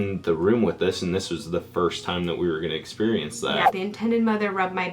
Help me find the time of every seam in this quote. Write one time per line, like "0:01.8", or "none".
0:03.7